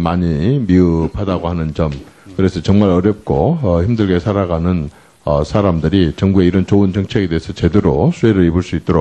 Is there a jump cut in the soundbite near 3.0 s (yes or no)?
no